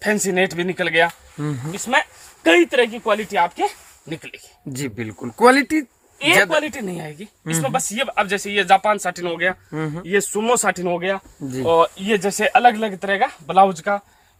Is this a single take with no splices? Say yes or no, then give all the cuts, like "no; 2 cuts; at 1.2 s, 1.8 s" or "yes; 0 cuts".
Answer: yes; 0 cuts